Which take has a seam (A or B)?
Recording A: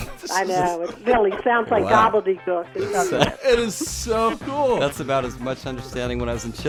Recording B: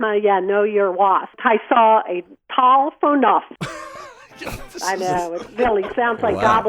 B